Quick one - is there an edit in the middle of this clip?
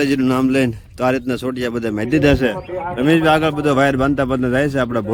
no; 0 cuts

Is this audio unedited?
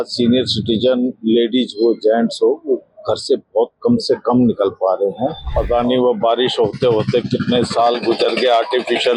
no; 1 cut; at 5.5 s

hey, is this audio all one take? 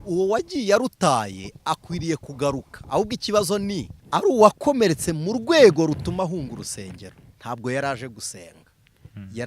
no; 1 cut; at 4.0 s

